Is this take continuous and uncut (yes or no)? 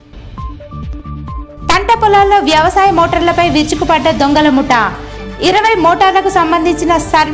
no